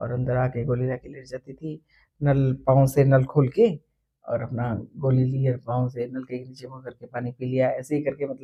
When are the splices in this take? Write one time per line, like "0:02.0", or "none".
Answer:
none